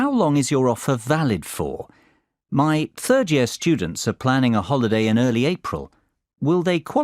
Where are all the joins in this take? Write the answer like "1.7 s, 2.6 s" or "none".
4.6 s